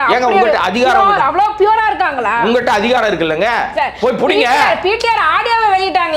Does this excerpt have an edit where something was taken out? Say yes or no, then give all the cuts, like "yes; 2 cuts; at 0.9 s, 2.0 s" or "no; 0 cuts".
no; 0 cuts